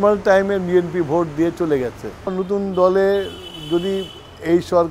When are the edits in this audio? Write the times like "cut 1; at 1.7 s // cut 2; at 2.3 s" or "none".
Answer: cut 1; at 2.3 s